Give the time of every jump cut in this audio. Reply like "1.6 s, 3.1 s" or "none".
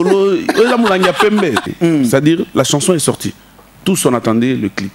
1.7 s